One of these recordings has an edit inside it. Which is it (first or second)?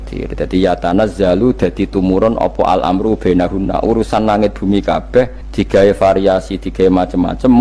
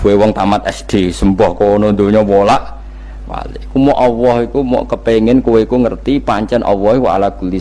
first